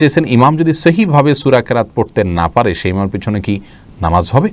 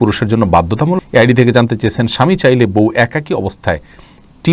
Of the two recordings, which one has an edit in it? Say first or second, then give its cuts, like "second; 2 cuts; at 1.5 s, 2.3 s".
second; 1 cut; at 1.0 s